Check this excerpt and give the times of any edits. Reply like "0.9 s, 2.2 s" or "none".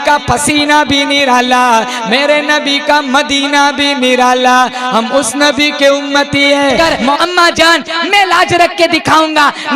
6.9 s